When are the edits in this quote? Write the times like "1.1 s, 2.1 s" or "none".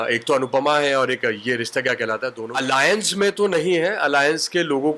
2.3 s